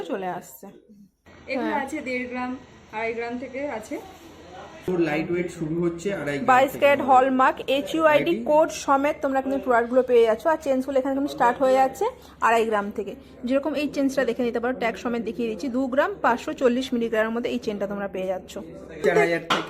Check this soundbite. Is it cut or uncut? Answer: cut